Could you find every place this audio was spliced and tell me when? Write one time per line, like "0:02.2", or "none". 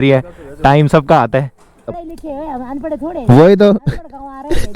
0:01.9